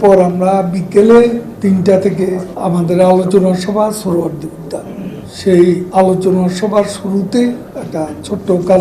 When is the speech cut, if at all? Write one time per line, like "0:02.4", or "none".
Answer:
0:01.5
0:02.5
0:05.2
0:05.9
0:07.7